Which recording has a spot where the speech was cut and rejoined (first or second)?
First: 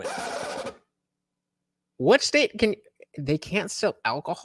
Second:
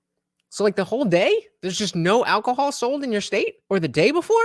second